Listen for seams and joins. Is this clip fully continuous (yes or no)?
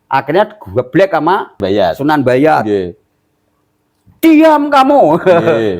no